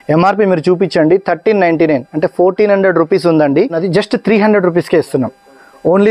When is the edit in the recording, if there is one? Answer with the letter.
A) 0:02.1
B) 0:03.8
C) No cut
B